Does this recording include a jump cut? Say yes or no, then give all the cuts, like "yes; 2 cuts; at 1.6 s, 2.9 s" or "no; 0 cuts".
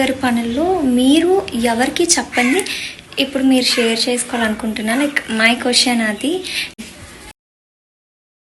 yes; 1 cut; at 6.7 s